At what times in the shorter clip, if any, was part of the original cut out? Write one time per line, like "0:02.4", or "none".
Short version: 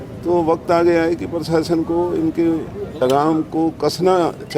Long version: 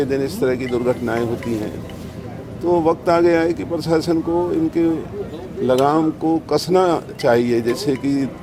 0:03.0